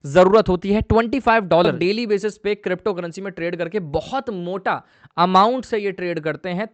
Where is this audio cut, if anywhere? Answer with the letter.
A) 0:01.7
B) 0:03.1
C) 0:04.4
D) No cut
A